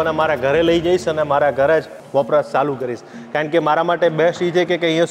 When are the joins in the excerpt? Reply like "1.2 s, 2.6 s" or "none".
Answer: 2.0 s